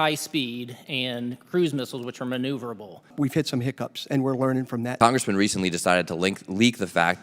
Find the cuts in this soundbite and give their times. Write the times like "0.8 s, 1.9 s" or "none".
3.1 s, 4.9 s

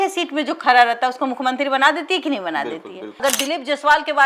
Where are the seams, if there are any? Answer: 3.2 s

